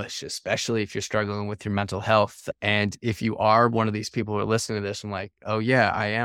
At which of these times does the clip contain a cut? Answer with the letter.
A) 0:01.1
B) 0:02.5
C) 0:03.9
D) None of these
B